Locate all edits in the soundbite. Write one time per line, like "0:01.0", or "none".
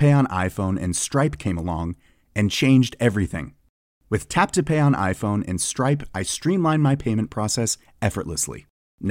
none